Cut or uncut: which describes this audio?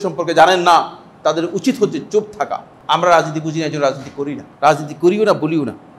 cut